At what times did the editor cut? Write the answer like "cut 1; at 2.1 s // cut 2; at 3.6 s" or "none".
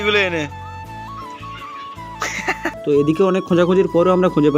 cut 1; at 2.7 s